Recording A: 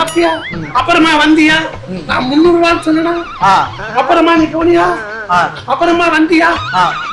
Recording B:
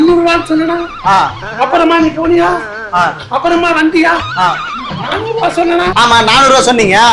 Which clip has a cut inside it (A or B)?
B